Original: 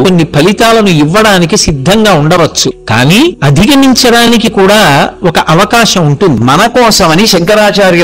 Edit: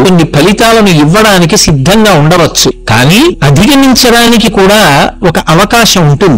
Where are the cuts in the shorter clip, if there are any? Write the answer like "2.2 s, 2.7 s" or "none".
none